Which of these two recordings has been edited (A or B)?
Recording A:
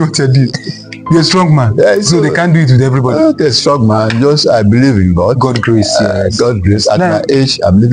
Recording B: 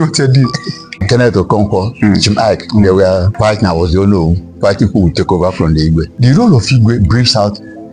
B